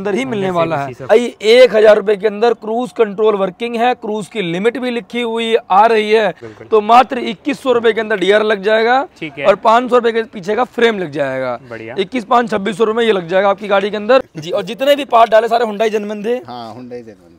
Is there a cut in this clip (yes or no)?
yes